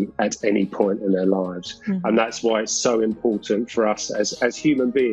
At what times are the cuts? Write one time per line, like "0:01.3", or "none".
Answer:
none